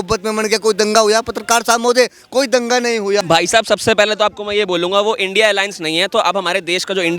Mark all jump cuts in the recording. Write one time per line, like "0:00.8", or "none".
0:03.2

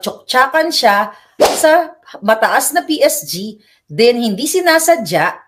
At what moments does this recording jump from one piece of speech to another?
none

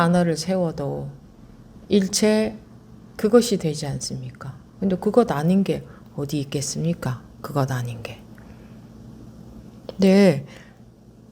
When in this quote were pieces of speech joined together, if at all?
0:09.1

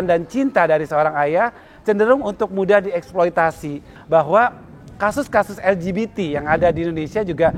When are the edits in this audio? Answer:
0:03.9

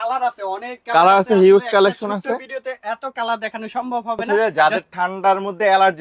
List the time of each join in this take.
0:04.2

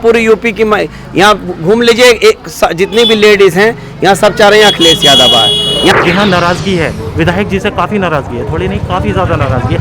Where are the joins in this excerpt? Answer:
0:05.9

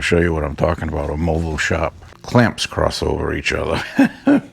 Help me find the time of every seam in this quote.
0:02.1

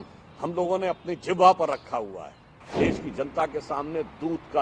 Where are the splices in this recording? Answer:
0:02.6

